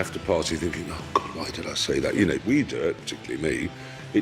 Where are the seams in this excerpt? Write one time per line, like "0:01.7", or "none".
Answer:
0:02.2